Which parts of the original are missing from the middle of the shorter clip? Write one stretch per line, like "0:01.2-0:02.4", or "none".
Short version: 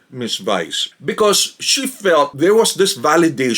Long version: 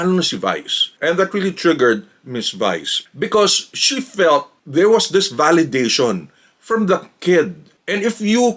0:04.5-0:04.7